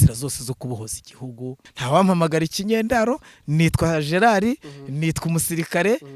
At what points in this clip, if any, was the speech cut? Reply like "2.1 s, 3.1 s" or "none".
1.7 s